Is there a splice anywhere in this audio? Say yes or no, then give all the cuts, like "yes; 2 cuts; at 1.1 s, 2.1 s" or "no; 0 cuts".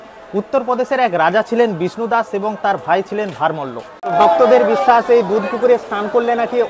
yes; 1 cut; at 4.1 s